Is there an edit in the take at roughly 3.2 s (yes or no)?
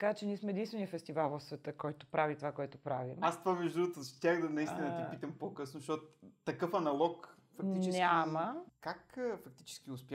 no